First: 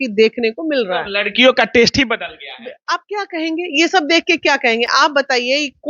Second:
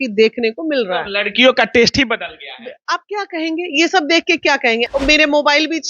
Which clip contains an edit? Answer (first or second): second